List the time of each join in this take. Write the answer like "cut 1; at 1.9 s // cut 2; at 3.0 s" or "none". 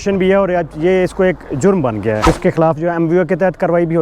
cut 1; at 2.3 s